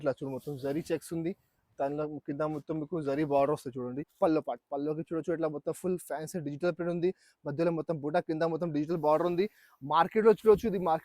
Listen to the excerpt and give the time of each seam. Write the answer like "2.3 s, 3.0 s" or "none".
4.0 s